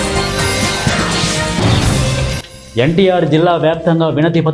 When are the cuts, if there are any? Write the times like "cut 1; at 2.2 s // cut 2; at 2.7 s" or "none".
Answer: cut 1; at 1.1 s